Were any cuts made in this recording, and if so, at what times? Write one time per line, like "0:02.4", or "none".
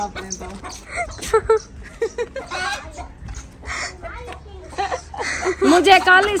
none

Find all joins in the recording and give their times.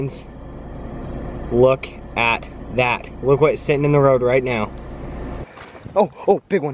0:05.5

